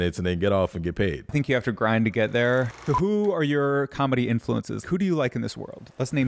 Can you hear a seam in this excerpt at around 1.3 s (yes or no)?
yes